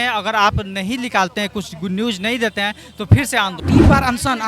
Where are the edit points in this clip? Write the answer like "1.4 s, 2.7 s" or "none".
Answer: 3.6 s